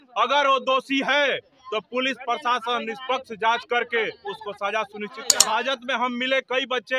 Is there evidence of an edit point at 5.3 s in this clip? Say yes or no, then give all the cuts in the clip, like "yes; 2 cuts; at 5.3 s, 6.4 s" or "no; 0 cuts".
yes; 1 cut; at 5.3 s